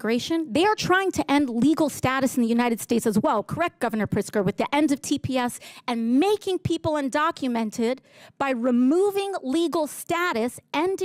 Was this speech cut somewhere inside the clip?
no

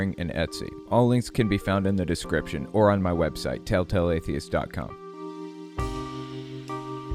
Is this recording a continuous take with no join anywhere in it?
no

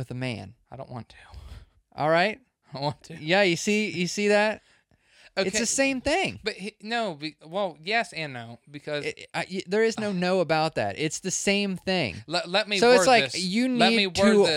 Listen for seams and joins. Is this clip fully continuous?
yes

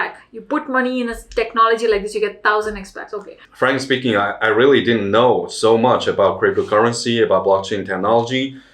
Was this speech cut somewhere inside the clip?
yes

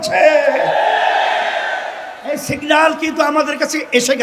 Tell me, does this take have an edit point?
no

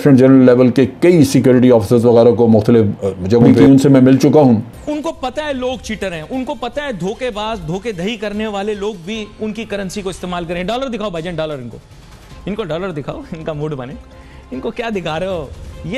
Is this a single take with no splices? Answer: no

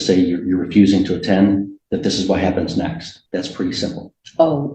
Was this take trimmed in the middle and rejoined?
yes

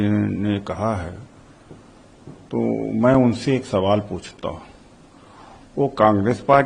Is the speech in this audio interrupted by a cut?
no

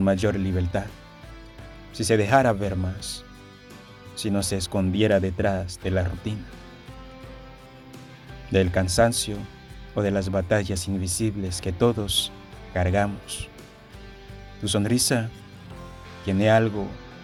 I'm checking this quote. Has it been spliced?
no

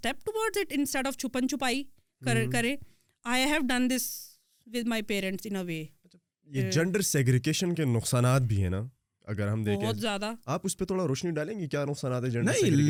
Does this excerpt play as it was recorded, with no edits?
yes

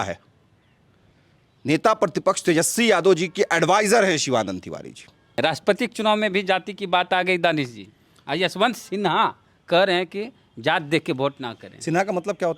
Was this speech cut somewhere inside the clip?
yes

